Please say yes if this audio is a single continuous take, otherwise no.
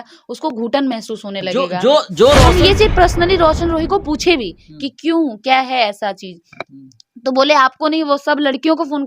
no